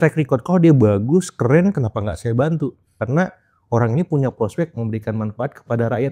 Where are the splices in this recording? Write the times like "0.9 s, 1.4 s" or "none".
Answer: 3.0 s